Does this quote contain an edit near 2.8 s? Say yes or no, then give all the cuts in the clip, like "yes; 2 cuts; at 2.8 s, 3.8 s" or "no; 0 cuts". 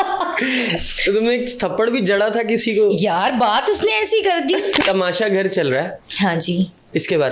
no; 1 cut; at 4.8 s